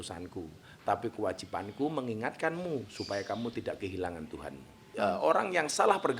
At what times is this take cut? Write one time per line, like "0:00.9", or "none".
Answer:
0:04.9